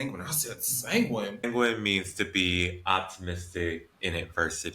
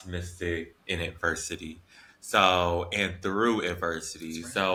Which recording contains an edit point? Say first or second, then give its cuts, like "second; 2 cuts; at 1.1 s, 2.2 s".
first; 1 cut; at 1.4 s